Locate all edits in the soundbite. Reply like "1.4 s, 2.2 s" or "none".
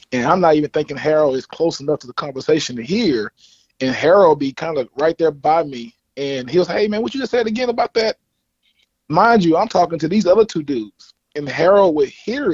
none